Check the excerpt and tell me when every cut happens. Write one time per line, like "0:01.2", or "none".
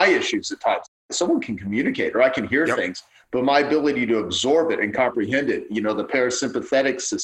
none